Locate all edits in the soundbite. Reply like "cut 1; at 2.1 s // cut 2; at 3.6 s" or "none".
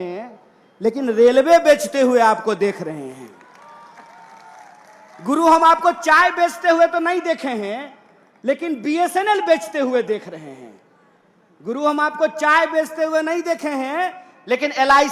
none